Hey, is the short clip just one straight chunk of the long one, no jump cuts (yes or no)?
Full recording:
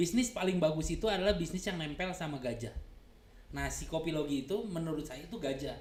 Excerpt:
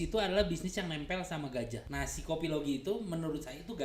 no